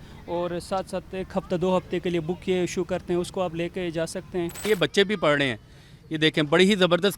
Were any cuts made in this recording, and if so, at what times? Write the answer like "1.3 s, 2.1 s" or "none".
4.7 s